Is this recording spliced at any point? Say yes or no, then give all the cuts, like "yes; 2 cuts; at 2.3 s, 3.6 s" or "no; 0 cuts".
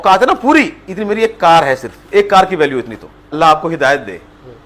yes; 1 cut; at 3.3 s